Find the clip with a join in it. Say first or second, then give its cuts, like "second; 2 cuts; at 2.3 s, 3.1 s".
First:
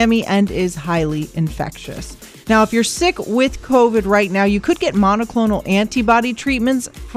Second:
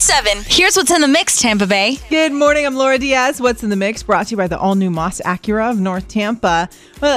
second; 1 cut; at 2.0 s